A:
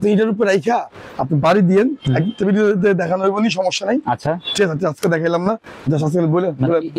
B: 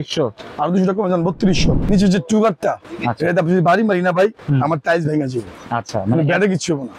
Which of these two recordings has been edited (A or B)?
B